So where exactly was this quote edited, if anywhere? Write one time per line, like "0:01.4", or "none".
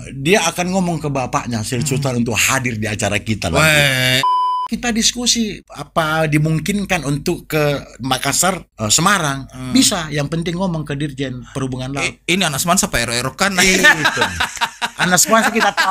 0:04.2
0:05.7
0:08.7